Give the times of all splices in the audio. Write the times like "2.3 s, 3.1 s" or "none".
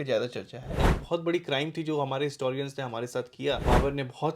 0.9 s, 3.6 s